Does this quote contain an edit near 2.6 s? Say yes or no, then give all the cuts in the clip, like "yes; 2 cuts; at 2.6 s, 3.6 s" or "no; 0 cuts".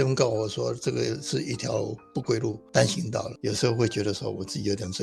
yes; 2 cuts; at 2.6 s, 3.3 s